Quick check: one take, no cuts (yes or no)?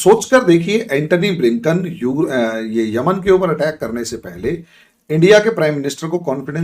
yes